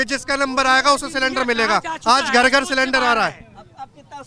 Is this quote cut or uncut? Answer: uncut